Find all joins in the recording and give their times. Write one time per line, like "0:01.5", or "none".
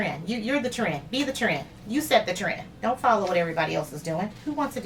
none